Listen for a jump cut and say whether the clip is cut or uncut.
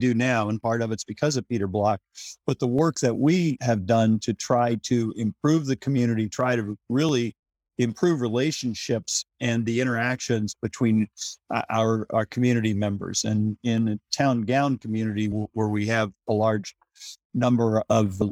uncut